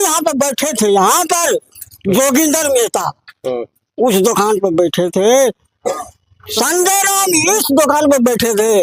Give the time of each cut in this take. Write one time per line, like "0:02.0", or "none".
none